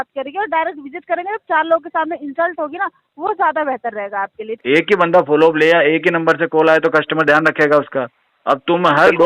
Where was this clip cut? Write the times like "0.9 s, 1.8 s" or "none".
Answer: 4.6 s